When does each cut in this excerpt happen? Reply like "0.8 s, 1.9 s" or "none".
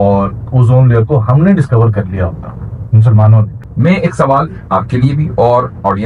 3.5 s